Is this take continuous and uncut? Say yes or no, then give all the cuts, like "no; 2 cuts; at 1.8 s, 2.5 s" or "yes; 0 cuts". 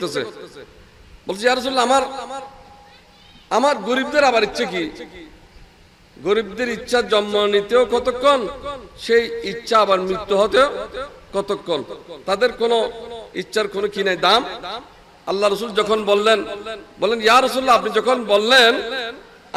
yes; 0 cuts